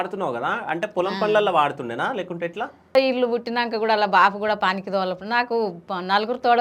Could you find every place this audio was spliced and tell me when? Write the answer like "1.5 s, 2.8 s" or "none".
2.9 s